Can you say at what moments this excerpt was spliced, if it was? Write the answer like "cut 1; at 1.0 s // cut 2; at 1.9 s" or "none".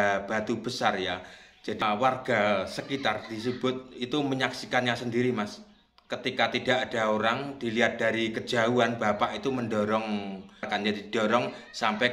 cut 1; at 1.8 s // cut 2; at 10.7 s